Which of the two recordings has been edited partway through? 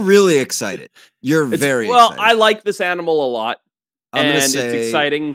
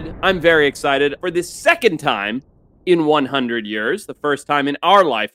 second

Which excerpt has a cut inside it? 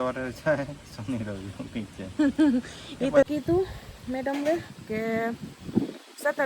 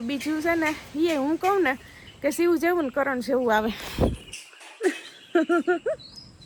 first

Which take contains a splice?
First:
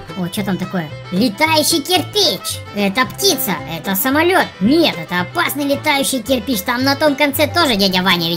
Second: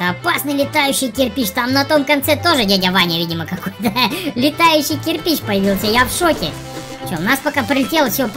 second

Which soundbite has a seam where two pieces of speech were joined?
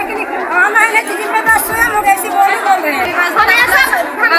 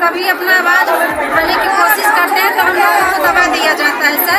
first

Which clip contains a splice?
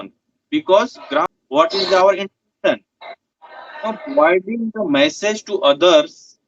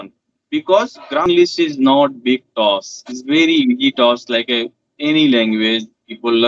second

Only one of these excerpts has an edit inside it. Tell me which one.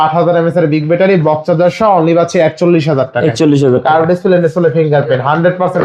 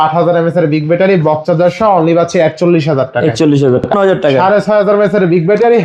second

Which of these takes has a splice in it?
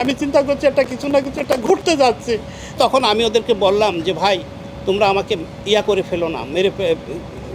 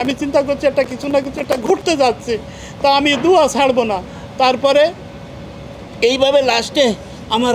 first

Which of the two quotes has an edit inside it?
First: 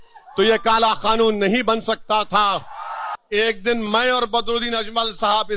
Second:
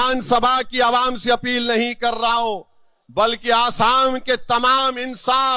first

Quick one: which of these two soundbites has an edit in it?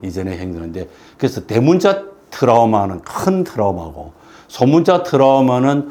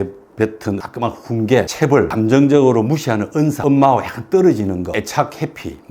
second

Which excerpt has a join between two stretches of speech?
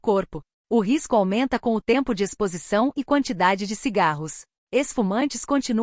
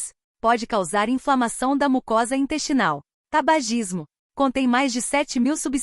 second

